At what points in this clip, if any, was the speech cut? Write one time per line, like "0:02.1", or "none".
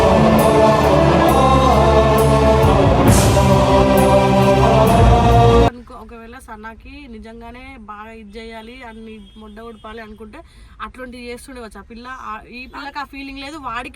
0:05.8